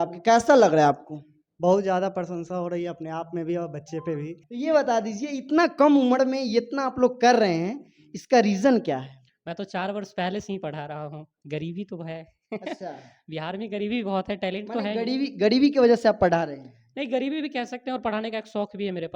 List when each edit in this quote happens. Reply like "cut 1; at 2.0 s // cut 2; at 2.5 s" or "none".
cut 1; at 4.4 s